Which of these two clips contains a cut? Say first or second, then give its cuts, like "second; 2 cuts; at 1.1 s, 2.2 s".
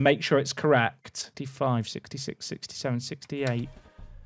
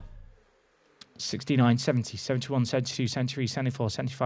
first; 1 cut; at 1.2 s